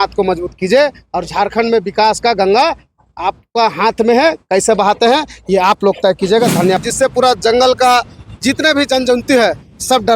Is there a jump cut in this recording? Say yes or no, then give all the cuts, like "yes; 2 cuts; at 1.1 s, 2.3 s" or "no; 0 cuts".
yes; 1 cut; at 6.8 s